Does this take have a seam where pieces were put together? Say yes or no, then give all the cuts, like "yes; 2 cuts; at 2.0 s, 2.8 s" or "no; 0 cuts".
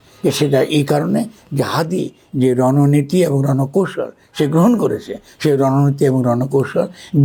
no; 0 cuts